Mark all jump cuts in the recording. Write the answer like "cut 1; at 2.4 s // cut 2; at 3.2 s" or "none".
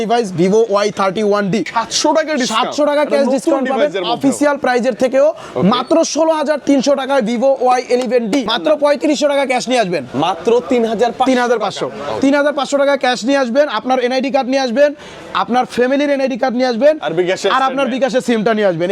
cut 1; at 1.7 s // cut 2; at 8.5 s

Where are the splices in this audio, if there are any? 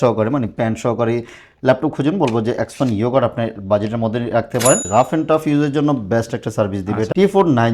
cut 1; at 4.9 s

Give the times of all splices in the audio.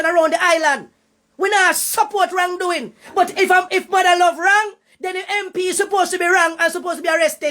none

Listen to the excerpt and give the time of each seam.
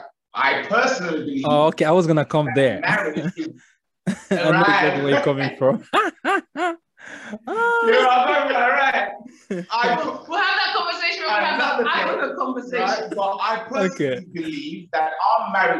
none

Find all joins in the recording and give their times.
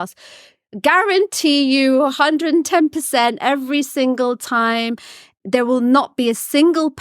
cut 1; at 5.3 s

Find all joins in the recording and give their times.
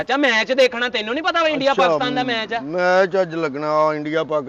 none

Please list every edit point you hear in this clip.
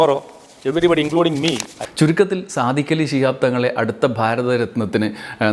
cut 1; at 1.7 s

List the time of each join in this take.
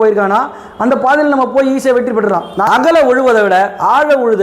cut 1; at 2.7 s

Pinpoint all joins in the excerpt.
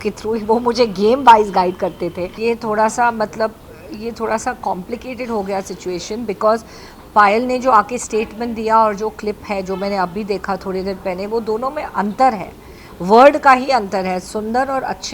cut 1; at 2.3 s

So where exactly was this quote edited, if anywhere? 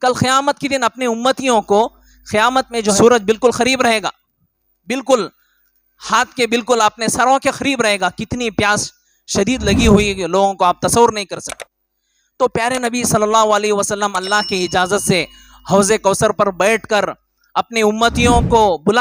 cut 1; at 3.0 s

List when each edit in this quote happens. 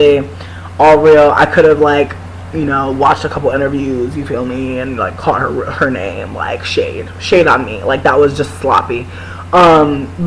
none

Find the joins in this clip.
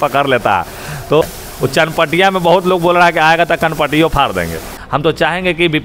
cut 1; at 1.2 s // cut 2; at 4.7 s

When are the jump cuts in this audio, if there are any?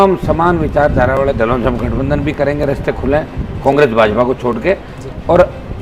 none

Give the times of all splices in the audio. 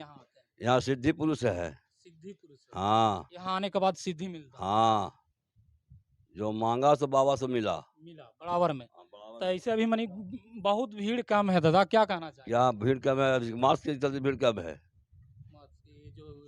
none

